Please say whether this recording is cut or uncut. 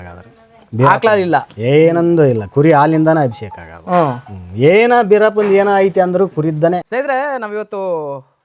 uncut